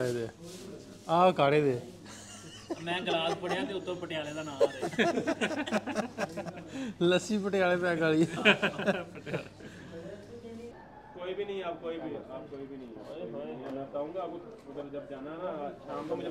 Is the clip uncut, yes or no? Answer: no